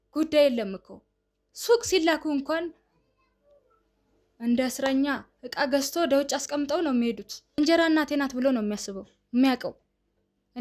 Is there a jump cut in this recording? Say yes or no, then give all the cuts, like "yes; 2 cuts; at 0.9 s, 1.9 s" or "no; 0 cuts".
yes; 1 cut; at 7.6 s